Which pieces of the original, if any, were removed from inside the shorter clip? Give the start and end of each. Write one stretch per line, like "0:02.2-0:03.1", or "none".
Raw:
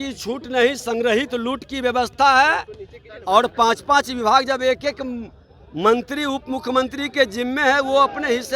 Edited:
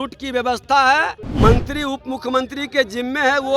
0:02.7-0:05.6